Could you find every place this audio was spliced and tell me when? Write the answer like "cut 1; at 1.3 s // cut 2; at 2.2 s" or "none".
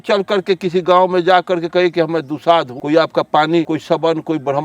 cut 1; at 2.8 s // cut 2; at 3.7 s